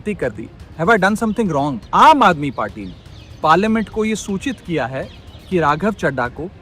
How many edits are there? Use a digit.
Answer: 1